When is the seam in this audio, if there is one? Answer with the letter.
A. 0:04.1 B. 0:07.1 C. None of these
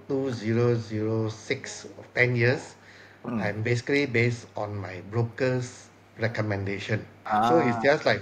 B